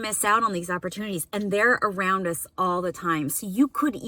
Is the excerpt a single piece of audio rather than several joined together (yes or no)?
yes